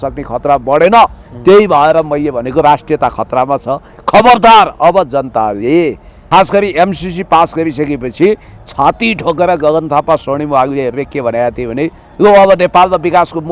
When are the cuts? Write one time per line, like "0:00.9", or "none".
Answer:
0:06.1